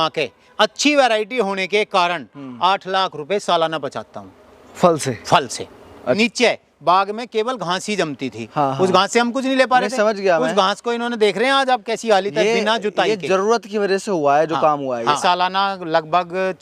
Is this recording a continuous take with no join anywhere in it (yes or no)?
no